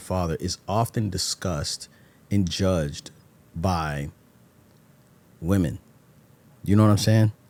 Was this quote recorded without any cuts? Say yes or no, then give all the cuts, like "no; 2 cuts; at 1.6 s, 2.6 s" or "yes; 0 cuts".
yes; 0 cuts